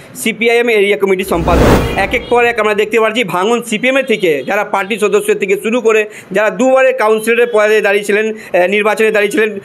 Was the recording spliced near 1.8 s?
yes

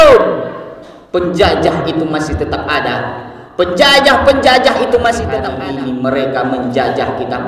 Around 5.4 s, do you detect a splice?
yes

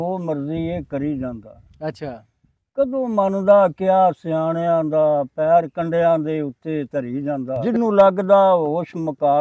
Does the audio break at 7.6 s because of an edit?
yes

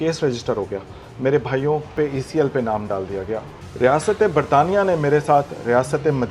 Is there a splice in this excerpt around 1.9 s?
yes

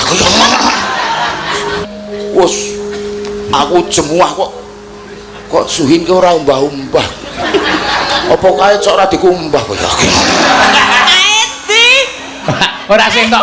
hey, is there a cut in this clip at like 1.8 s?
yes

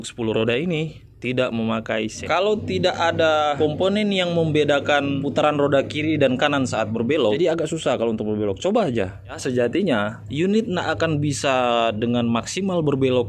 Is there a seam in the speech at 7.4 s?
yes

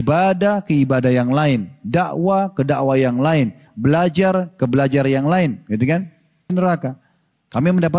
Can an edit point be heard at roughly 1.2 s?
no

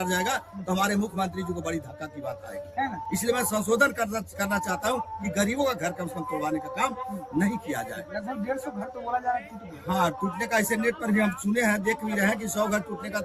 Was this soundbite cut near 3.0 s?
no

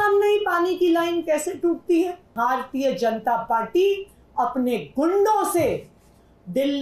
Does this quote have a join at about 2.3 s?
yes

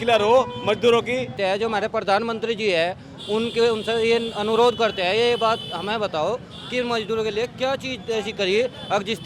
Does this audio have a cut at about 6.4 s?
no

